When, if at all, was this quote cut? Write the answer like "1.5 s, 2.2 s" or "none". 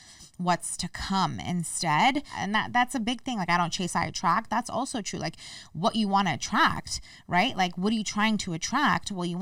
2.4 s